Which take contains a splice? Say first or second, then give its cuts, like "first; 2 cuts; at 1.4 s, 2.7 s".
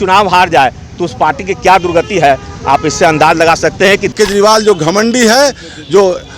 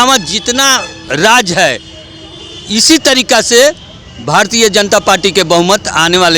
first; 1 cut; at 4.1 s